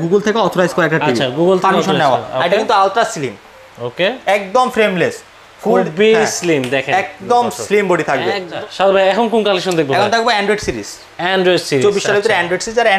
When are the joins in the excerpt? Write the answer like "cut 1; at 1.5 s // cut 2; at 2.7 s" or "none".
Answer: cut 1; at 8.5 s